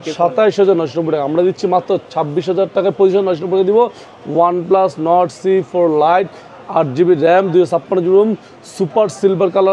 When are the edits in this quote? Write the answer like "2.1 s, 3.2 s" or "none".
none